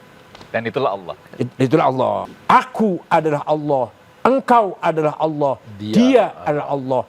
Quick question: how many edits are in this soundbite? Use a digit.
1